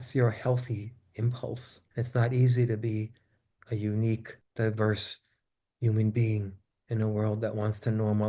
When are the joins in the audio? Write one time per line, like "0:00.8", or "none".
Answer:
0:01.8
0:04.4